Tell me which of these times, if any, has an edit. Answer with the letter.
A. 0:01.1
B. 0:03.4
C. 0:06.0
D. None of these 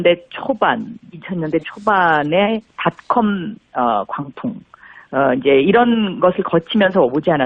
B